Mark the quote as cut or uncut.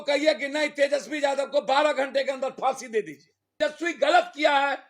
cut